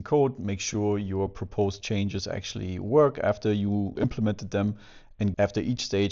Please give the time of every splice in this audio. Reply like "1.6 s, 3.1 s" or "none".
3.9 s, 5.3 s